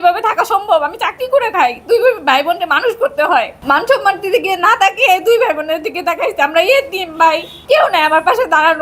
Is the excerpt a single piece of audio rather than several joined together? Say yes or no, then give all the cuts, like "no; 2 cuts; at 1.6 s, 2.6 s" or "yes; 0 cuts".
no; 2 cuts; at 3.6 s, 7.5 s